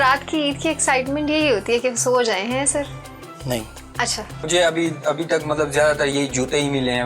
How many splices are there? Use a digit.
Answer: 1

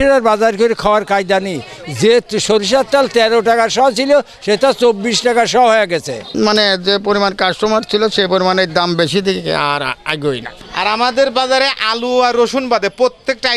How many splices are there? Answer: 2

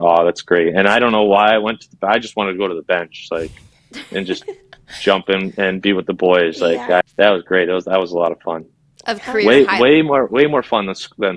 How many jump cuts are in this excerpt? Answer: 1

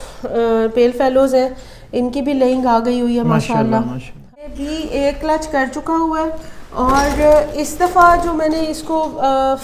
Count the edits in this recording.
1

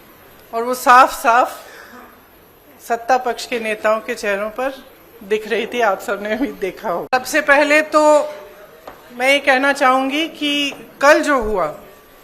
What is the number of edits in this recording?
1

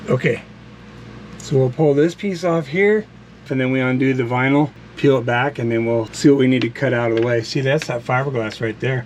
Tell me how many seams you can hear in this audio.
3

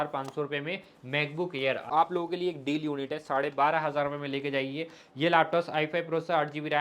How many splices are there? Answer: 1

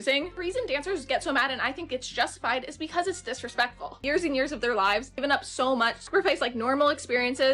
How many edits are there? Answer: 1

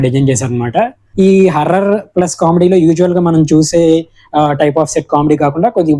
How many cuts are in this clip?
1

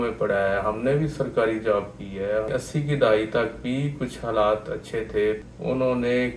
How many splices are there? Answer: 2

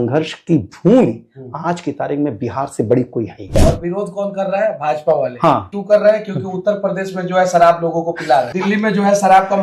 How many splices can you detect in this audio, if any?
3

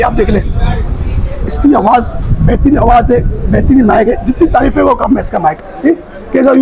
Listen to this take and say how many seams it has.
1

